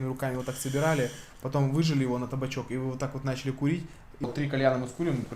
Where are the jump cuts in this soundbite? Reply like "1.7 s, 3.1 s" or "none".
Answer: 4.2 s